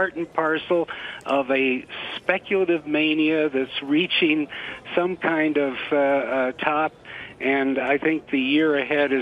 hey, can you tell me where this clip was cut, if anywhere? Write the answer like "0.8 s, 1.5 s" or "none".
7.7 s